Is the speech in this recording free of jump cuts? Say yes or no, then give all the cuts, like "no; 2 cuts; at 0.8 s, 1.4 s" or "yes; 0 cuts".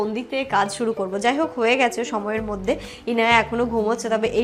yes; 0 cuts